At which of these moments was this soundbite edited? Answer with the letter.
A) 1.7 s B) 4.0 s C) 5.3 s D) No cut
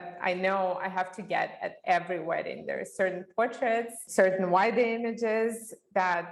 B